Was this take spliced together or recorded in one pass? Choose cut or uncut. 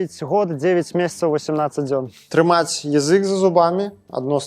cut